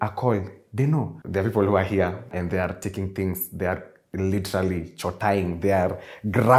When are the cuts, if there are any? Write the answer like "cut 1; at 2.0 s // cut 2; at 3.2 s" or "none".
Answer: cut 1; at 1.2 s // cut 2; at 2.4 s